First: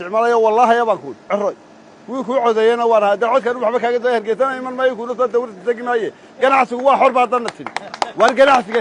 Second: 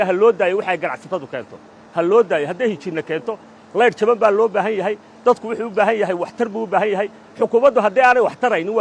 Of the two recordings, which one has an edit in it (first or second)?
first